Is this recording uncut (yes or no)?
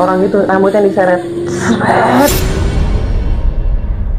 no